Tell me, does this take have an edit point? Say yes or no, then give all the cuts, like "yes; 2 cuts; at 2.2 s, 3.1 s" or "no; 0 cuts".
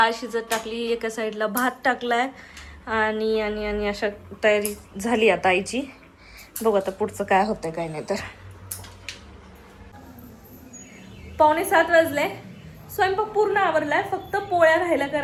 no; 0 cuts